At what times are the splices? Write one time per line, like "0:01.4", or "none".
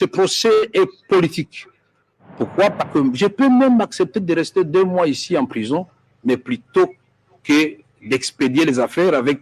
0:02.9